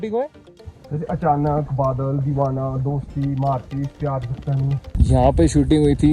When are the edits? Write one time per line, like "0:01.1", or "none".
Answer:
0:04.9